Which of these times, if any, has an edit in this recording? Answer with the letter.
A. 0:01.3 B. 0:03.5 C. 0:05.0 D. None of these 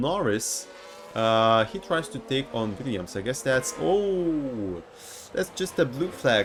D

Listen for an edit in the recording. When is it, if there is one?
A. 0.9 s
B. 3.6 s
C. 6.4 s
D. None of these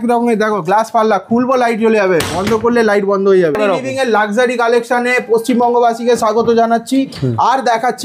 B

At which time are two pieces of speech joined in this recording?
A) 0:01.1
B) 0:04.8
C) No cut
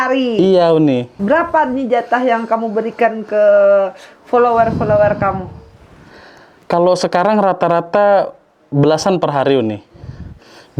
A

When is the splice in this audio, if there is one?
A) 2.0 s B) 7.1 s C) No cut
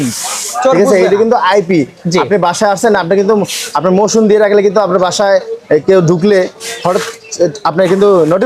C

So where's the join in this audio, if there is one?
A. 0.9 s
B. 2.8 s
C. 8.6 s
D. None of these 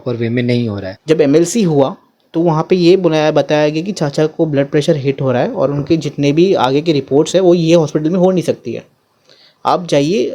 A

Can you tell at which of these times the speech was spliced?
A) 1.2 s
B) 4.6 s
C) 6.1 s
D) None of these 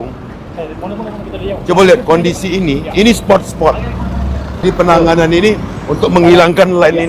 B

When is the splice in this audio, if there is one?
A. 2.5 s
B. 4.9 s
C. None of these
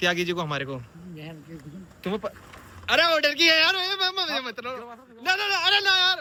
C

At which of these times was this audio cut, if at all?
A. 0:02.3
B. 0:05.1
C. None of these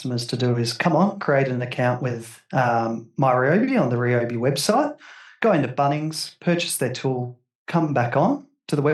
C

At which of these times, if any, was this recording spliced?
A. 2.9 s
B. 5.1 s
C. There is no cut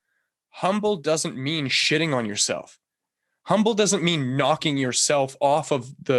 C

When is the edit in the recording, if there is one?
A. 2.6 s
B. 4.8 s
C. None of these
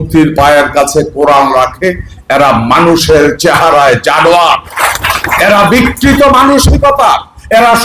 B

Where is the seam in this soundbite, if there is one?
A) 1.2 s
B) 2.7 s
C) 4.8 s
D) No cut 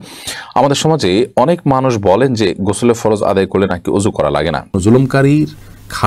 C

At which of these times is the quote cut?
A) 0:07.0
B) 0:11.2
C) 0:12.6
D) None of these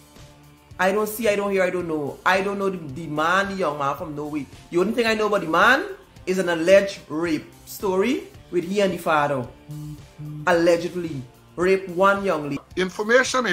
C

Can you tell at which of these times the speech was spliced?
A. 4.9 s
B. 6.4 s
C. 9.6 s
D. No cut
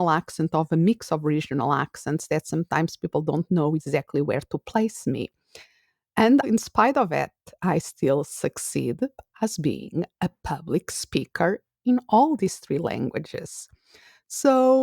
B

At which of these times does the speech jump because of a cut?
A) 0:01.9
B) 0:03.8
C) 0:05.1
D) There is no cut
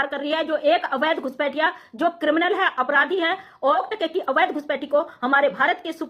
B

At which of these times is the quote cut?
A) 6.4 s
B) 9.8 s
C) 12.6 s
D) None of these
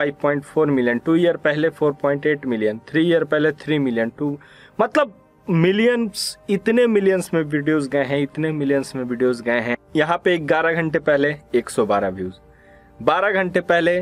B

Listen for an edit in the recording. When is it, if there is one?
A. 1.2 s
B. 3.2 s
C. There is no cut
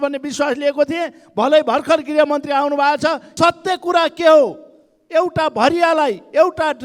B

